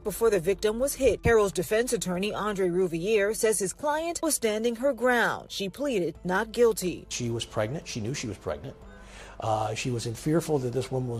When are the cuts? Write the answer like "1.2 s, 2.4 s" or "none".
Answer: none

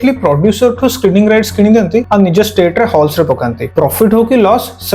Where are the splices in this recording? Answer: 2.1 s, 3.6 s

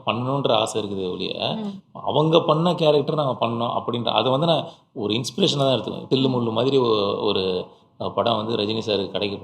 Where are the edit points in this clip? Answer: 6.0 s

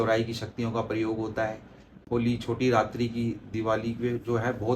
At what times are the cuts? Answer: 1.9 s

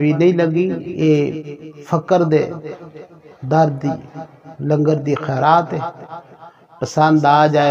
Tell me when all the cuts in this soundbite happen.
none

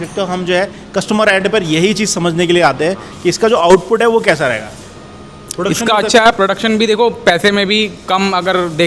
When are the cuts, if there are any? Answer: none

